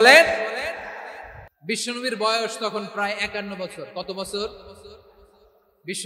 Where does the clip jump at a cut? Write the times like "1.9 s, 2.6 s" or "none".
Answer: 1.5 s